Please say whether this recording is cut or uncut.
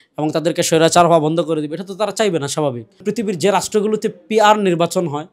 cut